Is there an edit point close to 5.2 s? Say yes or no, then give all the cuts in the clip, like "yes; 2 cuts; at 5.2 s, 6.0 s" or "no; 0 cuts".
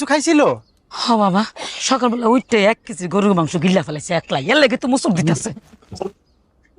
yes; 1 cut; at 5.2 s